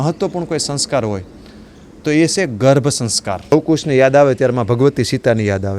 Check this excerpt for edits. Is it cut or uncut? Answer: cut